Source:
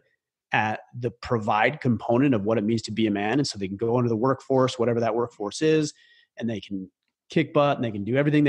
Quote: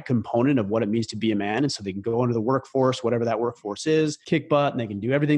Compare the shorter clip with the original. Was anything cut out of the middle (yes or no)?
yes